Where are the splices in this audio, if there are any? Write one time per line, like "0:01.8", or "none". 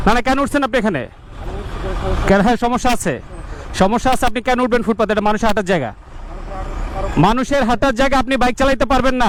none